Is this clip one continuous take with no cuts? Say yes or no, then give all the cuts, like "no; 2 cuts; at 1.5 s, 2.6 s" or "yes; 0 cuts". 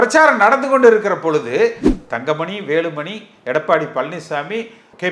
no; 1 cut; at 1.8 s